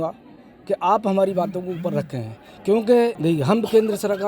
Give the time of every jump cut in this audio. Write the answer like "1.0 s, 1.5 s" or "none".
3.2 s